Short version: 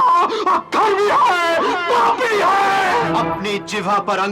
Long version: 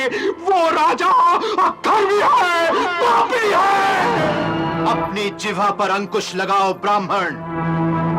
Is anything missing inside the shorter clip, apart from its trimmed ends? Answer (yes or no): yes